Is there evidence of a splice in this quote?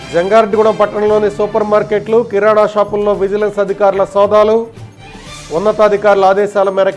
no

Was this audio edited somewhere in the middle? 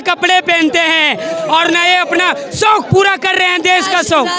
no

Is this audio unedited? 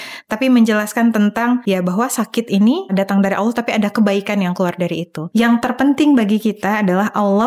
no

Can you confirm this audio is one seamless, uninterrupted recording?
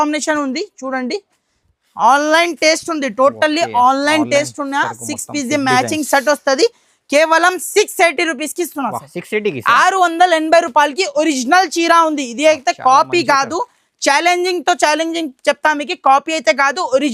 yes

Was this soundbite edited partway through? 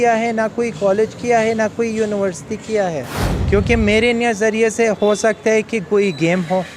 yes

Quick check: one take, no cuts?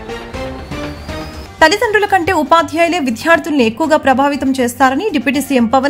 no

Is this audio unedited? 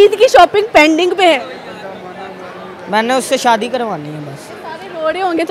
yes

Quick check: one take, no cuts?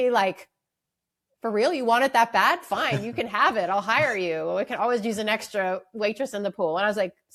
yes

